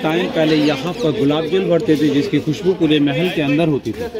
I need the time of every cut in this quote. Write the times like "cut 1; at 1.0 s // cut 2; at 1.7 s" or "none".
none